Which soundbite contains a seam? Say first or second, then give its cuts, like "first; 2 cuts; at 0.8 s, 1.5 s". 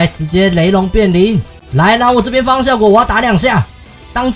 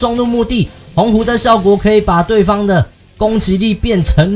first; 1 cut; at 1.6 s